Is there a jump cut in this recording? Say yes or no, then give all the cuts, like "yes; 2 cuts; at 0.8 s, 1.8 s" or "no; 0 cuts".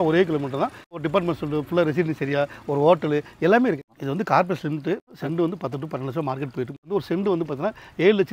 yes; 4 cuts; at 1.0 s, 3.9 s, 5.1 s, 6.8 s